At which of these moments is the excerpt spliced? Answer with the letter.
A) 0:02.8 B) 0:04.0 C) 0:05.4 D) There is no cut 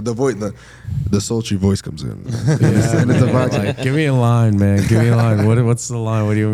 D